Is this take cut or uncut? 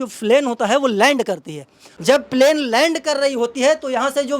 cut